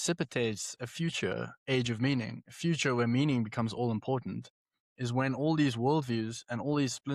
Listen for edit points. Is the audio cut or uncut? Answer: uncut